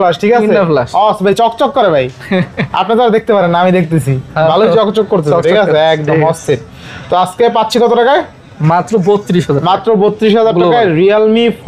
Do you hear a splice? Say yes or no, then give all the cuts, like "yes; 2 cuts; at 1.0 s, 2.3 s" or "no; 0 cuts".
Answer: no; 0 cuts